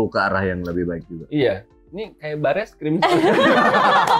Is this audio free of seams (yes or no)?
yes